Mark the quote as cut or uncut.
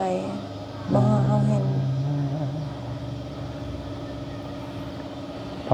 uncut